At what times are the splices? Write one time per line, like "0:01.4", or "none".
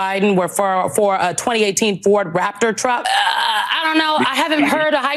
0:03.0

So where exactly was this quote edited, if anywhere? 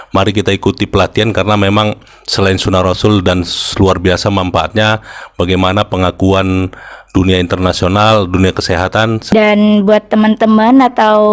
0:09.2

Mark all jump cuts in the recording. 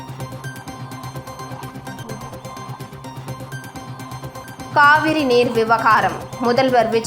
none

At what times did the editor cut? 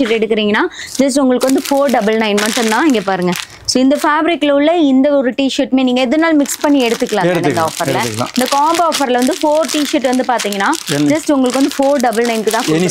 none

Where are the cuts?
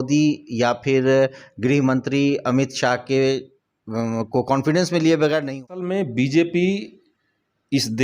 0:05.8

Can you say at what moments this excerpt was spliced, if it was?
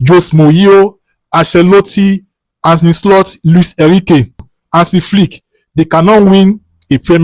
0:04.5

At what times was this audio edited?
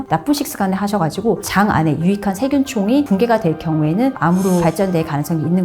0:04.6

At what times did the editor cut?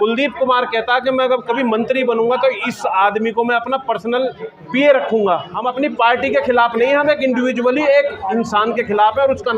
0:05.6

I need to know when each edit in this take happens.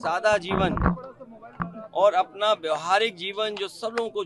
none

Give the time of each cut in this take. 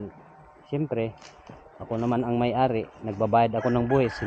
none

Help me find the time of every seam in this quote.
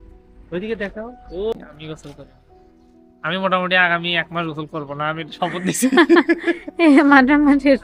0:01.5

